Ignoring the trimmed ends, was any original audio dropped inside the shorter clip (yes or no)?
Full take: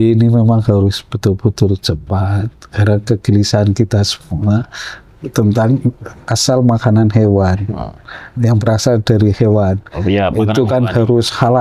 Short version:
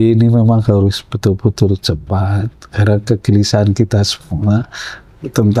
no